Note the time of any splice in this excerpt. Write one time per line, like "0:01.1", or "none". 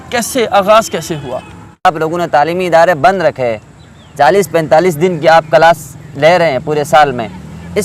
0:01.9